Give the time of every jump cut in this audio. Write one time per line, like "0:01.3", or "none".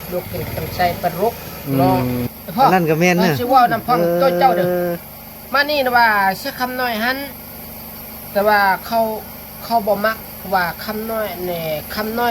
0:02.3